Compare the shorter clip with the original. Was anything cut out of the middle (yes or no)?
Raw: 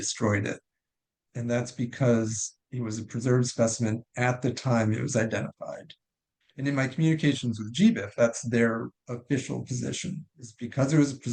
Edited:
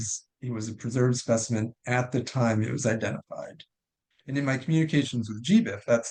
no